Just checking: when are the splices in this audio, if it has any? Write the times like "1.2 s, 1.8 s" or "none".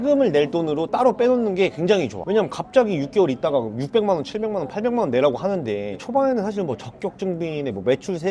2.2 s, 6.0 s